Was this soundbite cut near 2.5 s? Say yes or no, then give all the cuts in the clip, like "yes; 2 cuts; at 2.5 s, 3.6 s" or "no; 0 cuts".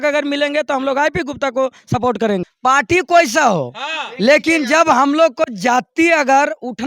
yes; 1 cut; at 2.5 s